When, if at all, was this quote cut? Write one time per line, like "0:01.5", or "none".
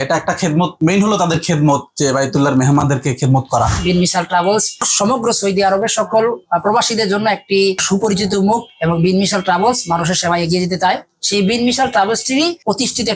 0:03.8